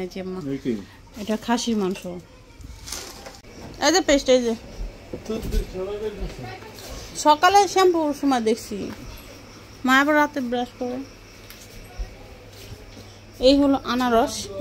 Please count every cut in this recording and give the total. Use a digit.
1